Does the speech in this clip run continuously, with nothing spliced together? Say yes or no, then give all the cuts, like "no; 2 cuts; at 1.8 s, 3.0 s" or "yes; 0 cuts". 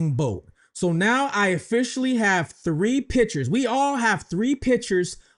yes; 0 cuts